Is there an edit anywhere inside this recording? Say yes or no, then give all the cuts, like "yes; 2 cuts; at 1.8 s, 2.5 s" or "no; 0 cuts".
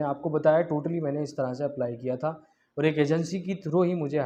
no; 0 cuts